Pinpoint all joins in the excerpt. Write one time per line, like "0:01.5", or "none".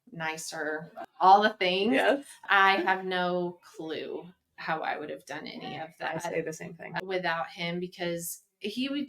0:01.0
0:02.4
0:07.0